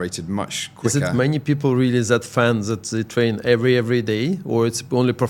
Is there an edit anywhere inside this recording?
no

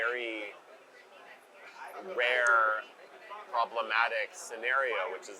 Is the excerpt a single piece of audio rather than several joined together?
yes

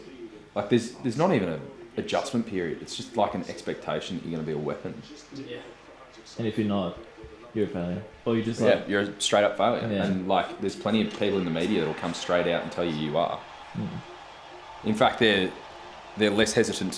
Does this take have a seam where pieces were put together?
no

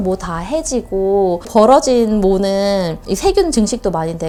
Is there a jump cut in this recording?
no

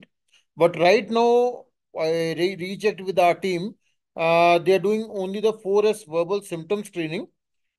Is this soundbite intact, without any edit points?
yes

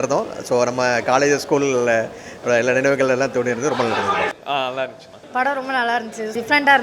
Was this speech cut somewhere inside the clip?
yes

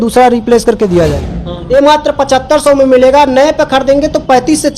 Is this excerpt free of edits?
no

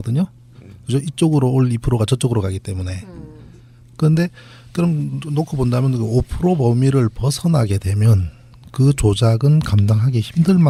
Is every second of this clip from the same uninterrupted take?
yes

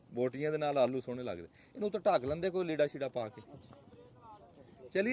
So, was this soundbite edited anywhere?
no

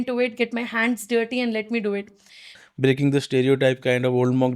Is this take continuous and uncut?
no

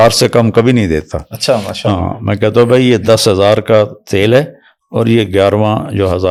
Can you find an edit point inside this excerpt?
no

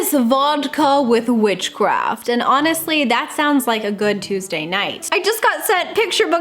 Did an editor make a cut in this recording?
yes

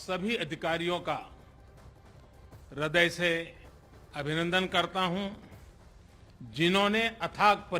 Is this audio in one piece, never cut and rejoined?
no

